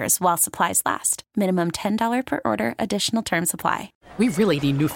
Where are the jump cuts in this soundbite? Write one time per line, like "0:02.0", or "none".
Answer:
0:04.0